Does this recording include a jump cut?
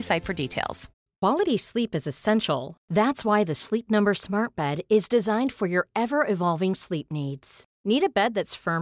yes; 1 cut; at 0.9 s

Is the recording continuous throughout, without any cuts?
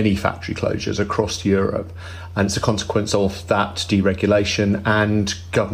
yes; 0 cuts

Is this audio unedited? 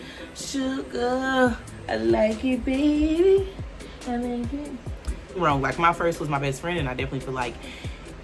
no; 1 cut; at 5.4 s

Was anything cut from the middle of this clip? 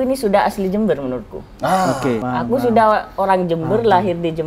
yes; 1 cut; at 2.2 s

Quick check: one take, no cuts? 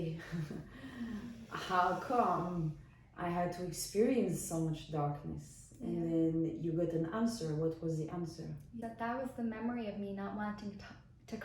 no; 1 cut; at 8.8 s

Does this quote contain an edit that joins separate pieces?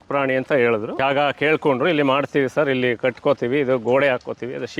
yes; 1 cut; at 0.9 s

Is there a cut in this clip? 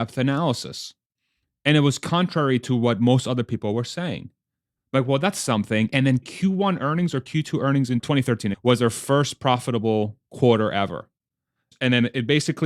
yes; 3 cuts; at 6.3 s, 8.1 s, 11.7 s

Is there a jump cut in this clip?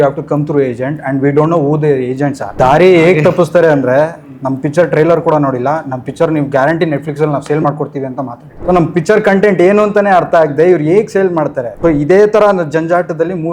yes; 3 cuts; at 2.5 s, 8.4 s, 11.7 s

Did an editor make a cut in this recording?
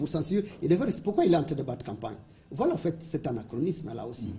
no; 0 cuts

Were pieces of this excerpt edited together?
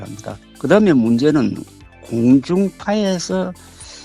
no; 0 cuts

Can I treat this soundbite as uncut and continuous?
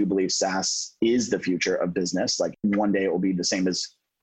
no; 1 cut; at 2.6 s

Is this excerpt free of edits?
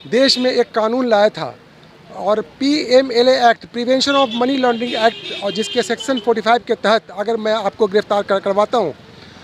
yes; 0 cuts

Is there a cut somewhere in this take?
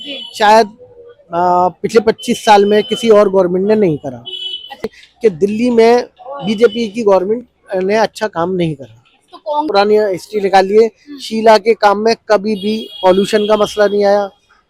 yes; 2 cuts; at 5.0 s, 9.7 s

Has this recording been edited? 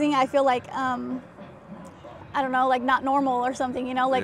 no; 0 cuts

